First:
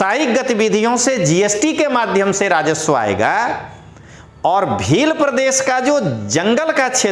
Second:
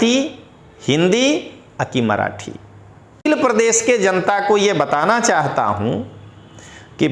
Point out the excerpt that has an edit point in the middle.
second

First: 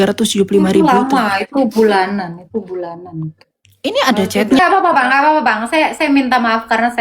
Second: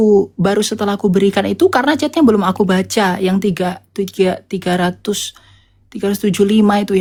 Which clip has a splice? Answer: first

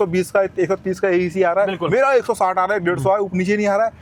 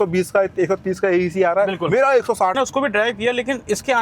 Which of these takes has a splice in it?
second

